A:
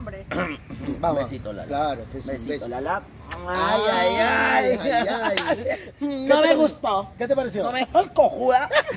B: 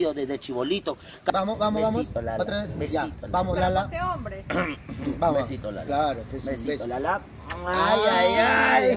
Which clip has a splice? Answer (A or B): B